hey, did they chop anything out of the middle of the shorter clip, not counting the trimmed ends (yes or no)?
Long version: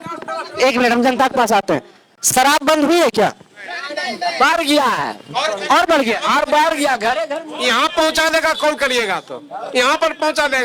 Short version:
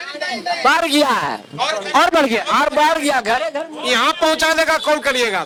no